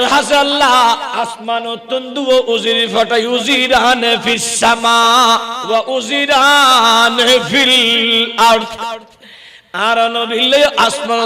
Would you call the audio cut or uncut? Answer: cut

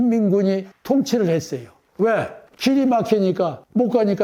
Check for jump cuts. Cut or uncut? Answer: uncut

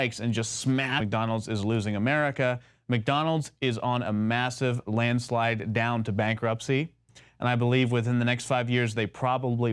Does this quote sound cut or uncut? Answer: uncut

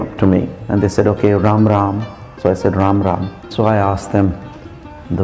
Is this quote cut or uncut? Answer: cut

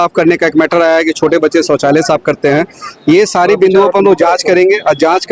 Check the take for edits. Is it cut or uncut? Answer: uncut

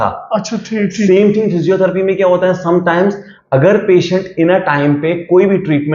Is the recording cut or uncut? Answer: uncut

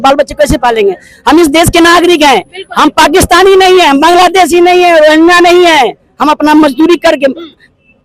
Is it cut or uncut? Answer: uncut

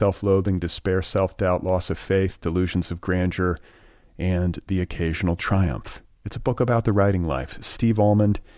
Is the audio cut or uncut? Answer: uncut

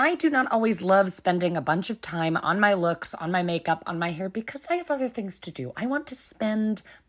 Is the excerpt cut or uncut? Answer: uncut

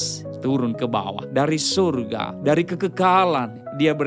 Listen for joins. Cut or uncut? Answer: cut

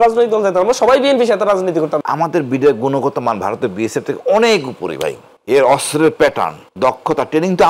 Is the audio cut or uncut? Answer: cut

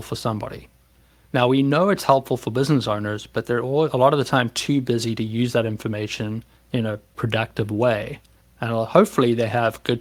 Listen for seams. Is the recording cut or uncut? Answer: uncut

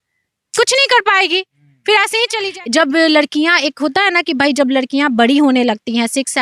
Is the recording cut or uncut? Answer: cut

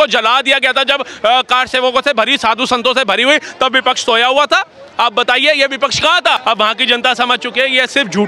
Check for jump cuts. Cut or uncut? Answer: cut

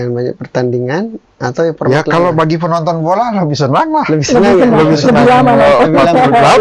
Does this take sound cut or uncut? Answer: uncut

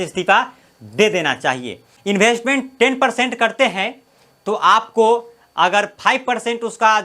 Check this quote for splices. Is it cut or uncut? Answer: cut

